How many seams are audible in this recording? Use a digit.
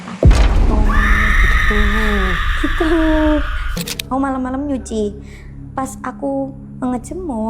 1